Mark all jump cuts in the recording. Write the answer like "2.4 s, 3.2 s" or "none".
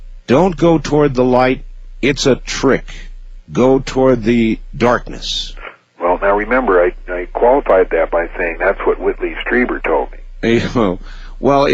none